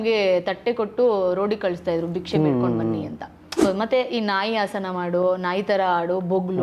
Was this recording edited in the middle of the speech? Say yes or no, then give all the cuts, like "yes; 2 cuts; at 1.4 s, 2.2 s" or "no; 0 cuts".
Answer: yes; 1 cut; at 3.6 s